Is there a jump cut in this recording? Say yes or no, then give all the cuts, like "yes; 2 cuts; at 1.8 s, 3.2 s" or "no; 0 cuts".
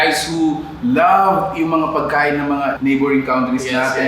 yes; 1 cut; at 2.8 s